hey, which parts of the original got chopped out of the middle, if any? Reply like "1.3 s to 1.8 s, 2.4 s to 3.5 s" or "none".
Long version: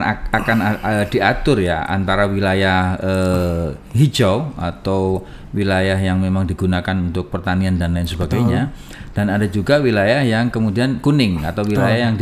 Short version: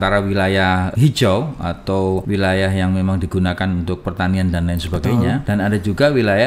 3.0 s to 3.9 s, 5.2 s to 5.5 s, 8.7 s to 9.1 s